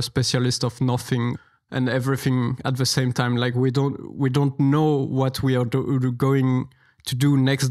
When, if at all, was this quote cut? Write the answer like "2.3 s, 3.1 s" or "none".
1.4 s